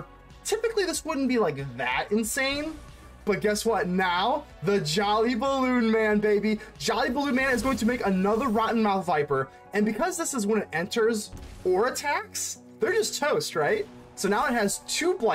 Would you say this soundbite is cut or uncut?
uncut